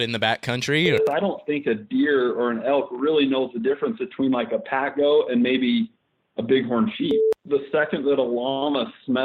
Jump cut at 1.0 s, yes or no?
yes